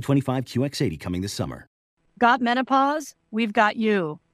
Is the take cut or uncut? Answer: cut